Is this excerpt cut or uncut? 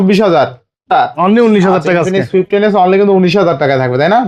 cut